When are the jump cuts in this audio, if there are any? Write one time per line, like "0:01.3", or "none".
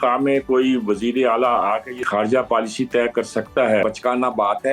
0:02.1
0:03.8